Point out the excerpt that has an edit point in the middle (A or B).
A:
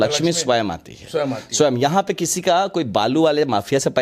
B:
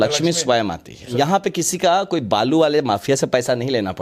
B